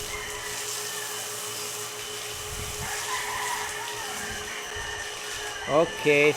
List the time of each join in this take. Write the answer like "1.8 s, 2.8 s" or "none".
none